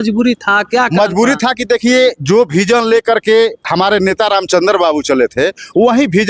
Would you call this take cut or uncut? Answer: uncut